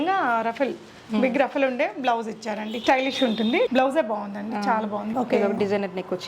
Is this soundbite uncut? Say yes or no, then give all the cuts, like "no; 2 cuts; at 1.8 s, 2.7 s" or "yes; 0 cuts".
no; 2 cuts; at 3.7 s, 5.1 s